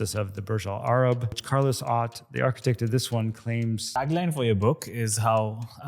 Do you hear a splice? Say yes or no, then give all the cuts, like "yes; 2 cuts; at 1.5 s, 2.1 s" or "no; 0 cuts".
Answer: yes; 2 cuts; at 1.4 s, 4.0 s